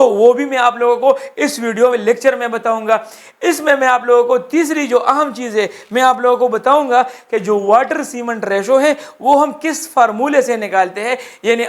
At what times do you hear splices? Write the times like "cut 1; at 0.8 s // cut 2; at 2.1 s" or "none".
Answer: none

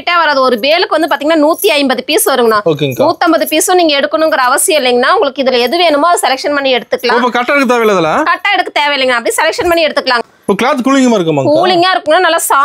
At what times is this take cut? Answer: cut 1; at 10.2 s

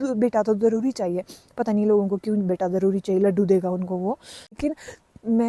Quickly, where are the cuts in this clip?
cut 1; at 4.5 s

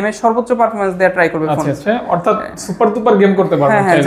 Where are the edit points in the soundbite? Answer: none

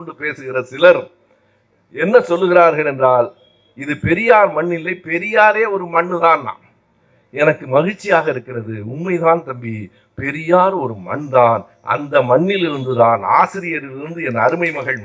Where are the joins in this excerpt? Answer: none

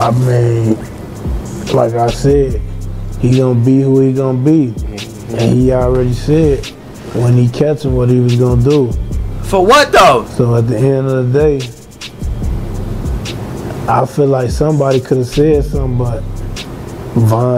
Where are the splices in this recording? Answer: none

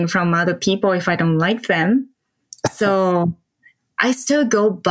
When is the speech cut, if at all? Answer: none

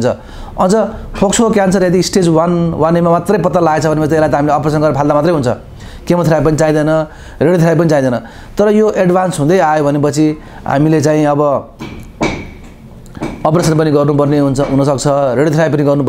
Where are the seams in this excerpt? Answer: none

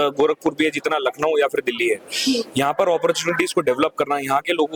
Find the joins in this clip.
none

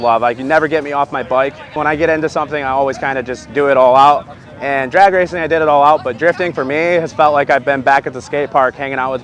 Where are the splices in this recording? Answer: cut 1; at 1.7 s

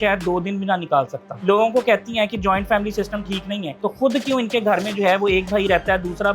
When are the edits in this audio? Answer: cut 1; at 1.3 s // cut 2; at 3.7 s

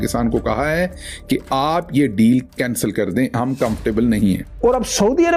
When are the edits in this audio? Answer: cut 1; at 4.5 s

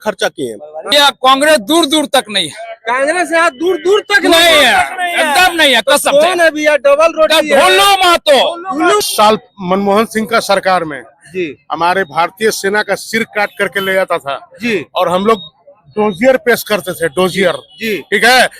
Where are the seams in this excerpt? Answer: cut 1; at 0.9 s // cut 2; at 9.0 s

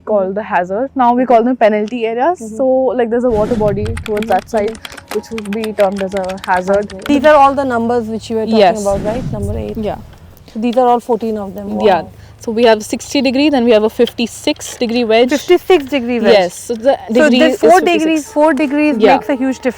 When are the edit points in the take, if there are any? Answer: cut 1; at 7.1 s

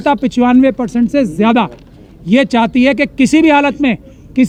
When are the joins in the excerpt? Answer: none

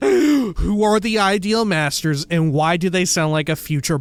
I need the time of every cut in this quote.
none

